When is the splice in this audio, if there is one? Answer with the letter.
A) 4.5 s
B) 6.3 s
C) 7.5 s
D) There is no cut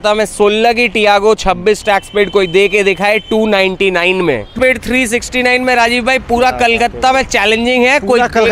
A